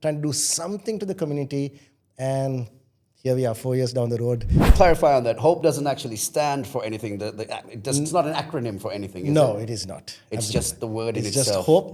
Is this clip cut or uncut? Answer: cut